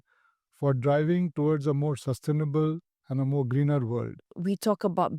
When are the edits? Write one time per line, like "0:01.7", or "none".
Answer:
0:04.1